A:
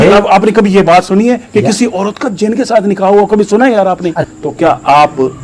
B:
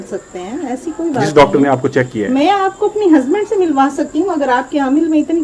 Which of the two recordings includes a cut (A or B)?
A